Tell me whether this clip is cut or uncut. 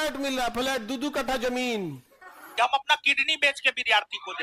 cut